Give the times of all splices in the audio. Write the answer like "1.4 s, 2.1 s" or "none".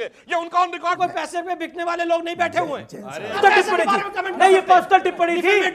3.4 s